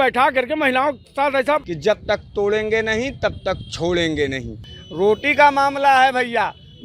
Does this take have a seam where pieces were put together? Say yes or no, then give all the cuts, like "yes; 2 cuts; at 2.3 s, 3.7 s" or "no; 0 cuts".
yes; 2 cuts; at 1.7 s, 4.7 s